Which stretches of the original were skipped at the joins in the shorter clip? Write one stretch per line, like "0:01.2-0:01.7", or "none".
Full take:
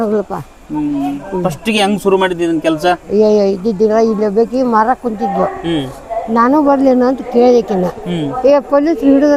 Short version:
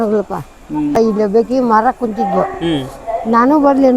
0:01.0-0:04.0